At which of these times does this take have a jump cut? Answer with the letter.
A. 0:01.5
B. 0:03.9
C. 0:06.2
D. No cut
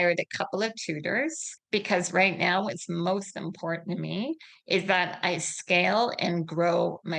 A